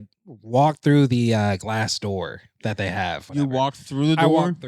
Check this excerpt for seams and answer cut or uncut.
cut